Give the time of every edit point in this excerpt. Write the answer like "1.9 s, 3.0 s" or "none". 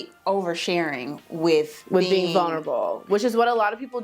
none